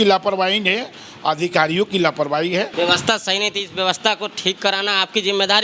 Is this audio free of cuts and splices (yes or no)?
no